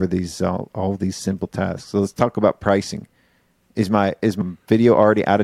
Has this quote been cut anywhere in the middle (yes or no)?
no